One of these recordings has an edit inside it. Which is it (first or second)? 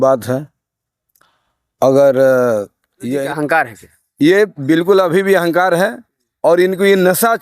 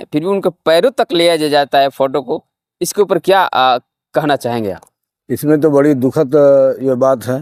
first